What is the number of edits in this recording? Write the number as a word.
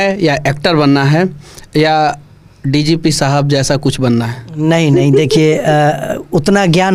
zero